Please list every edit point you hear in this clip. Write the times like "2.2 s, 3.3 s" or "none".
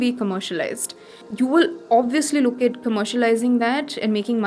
1.2 s